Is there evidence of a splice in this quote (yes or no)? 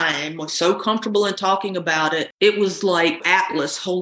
yes